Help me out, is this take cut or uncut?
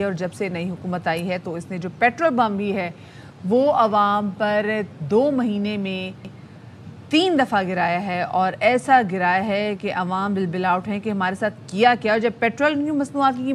uncut